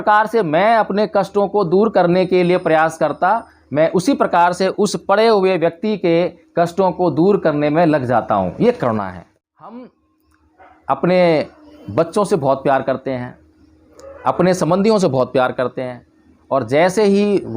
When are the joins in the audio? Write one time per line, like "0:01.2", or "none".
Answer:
0:09.1